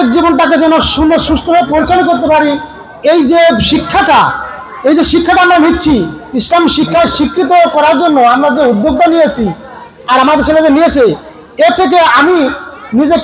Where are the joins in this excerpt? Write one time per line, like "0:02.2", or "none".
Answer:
none

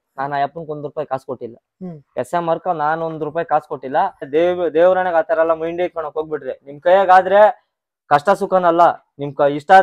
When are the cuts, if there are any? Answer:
0:04.3

